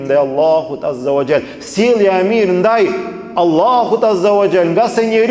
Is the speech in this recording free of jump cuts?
yes; 0 cuts

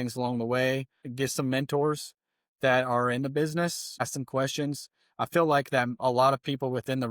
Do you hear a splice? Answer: yes; 2 cuts; at 1.0 s, 4.0 s

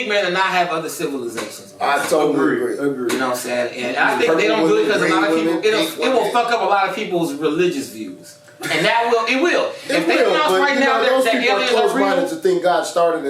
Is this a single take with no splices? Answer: yes; 0 cuts

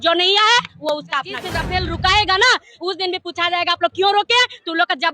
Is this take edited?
yes; 1 cut; at 1.5 s

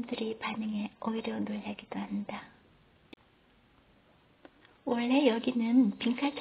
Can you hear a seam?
yes; 1 cut; at 3.1 s

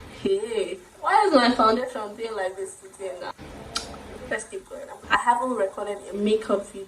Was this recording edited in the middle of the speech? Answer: yes; 2 cuts; at 3.3 s, 4.9 s

